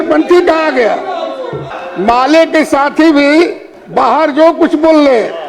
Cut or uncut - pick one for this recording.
cut